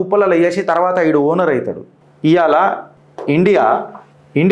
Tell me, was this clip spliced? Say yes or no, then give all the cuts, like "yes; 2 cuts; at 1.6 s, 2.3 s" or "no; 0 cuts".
no; 0 cuts